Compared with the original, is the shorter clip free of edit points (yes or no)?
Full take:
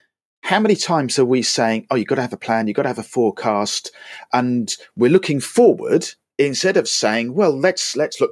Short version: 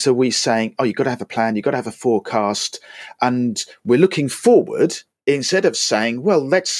yes